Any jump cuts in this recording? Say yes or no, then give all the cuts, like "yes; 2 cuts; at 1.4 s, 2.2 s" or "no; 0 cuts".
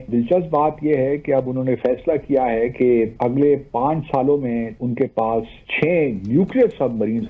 yes; 2 cuts; at 4.7 s, 5.7 s